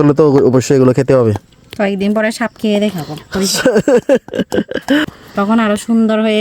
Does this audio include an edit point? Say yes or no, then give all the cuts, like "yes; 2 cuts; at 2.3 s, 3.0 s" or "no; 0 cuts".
yes; 1 cut; at 5.1 s